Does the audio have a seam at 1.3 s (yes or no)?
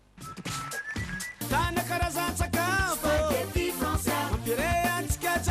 yes